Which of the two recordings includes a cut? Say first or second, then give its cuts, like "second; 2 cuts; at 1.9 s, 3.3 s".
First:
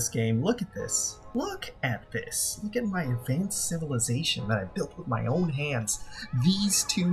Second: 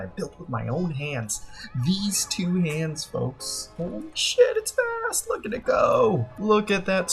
second; 1 cut; at 3.7 s